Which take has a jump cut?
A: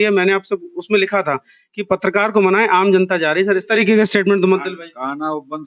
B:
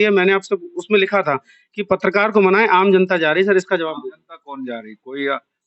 A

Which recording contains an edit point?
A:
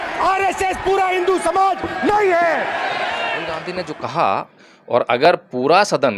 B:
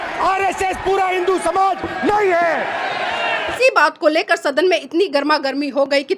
A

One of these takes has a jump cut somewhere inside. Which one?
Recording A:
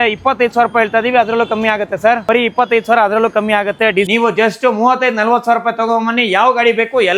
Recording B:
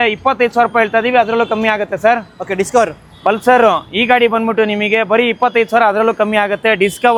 A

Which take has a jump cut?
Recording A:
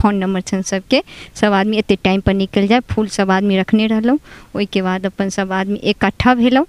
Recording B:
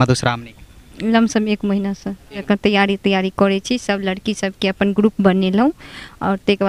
B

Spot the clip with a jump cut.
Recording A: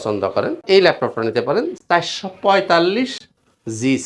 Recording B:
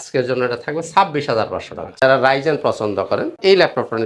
B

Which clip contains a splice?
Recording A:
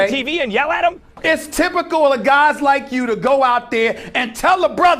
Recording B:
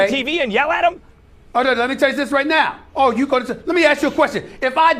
A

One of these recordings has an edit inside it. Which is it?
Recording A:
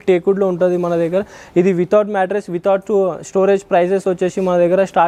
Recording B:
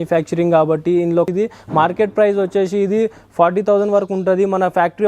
B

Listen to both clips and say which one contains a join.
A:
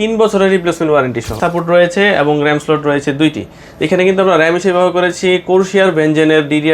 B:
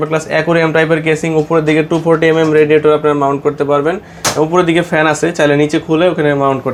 A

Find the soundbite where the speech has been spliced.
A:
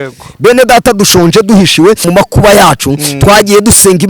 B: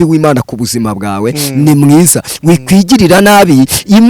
A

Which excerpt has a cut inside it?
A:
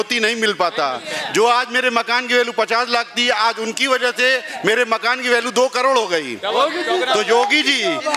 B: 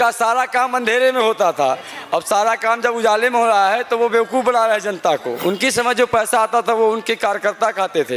B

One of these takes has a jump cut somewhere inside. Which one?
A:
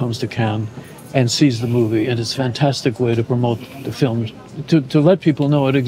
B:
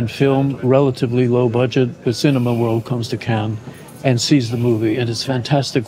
B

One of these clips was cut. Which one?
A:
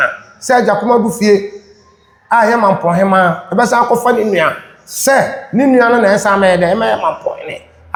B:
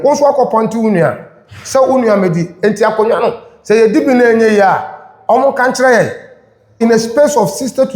B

